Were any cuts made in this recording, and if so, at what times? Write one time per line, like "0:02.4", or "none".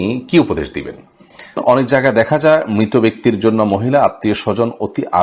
0:01.6